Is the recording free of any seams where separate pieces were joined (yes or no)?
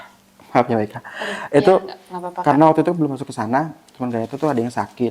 yes